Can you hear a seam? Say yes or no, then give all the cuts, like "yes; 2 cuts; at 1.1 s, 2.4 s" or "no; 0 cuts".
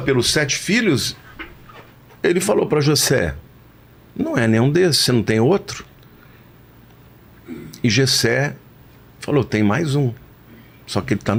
no; 0 cuts